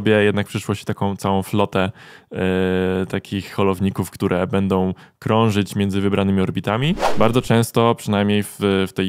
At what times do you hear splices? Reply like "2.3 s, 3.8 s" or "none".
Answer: 7.1 s